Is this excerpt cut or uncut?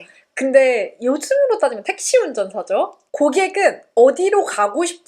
cut